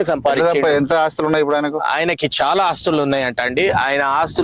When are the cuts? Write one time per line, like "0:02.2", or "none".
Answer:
none